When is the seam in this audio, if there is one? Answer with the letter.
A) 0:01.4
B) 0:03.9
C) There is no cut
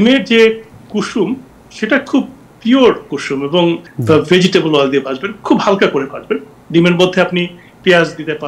B